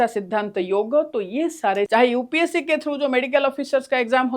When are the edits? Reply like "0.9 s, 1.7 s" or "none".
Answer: 1.9 s